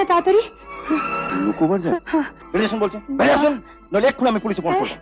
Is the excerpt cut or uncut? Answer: cut